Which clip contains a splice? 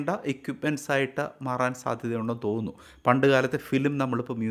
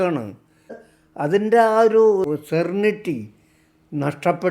second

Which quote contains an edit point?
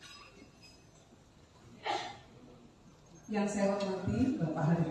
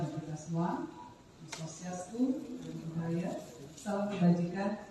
second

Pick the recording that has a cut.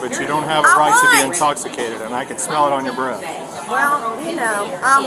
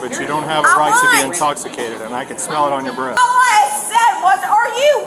second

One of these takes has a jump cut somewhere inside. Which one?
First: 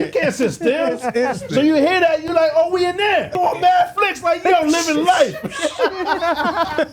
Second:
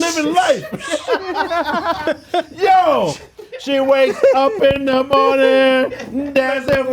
first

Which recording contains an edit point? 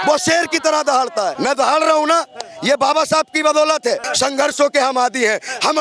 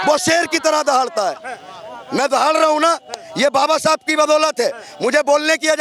first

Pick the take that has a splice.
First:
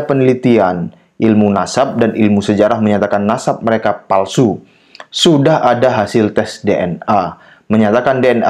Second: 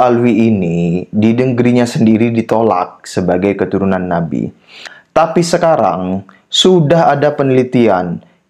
second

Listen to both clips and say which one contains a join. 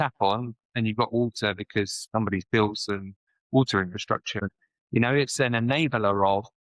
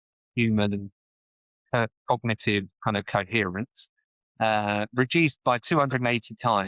first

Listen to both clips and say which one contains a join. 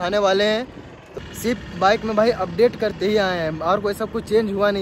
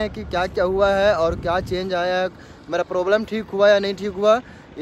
first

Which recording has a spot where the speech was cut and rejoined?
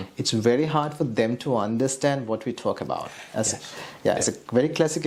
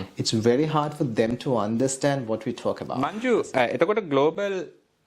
second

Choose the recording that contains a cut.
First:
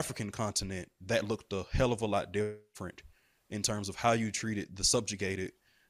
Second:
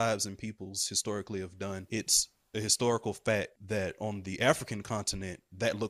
second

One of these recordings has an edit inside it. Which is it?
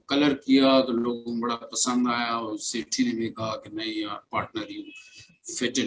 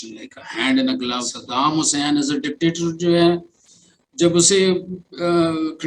second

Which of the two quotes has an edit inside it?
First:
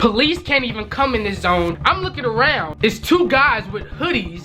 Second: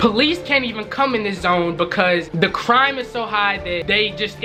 first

